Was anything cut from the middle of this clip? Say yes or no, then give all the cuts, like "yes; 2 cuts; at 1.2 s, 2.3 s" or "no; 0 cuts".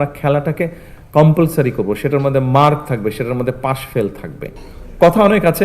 yes; 1 cut; at 4.5 s